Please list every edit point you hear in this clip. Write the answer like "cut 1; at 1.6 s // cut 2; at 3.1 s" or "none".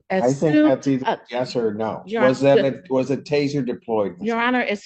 none

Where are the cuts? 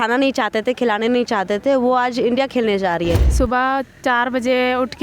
cut 1; at 3.3 s

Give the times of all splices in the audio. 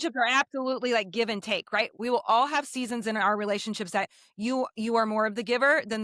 cut 1; at 2.0 s

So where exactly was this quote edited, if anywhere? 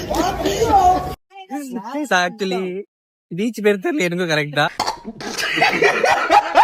none

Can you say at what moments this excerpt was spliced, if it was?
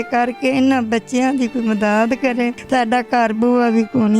cut 1; at 2.6 s

